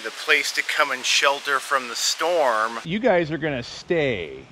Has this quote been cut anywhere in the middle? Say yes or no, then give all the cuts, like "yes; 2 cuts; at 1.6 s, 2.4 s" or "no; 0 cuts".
yes; 1 cut; at 2.8 s